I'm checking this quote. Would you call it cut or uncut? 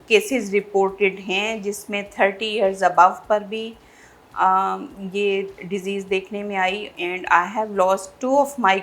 uncut